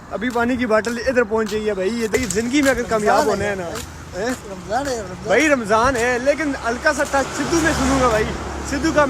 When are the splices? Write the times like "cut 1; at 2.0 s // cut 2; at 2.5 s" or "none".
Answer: cut 1; at 2.1 s